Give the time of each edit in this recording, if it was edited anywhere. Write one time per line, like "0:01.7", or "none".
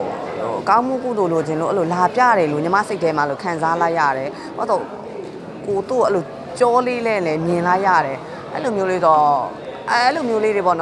none